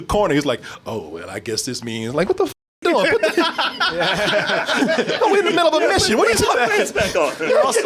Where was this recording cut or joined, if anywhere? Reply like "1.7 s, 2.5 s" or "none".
none